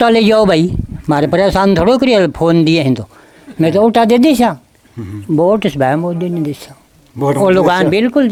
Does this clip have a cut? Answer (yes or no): no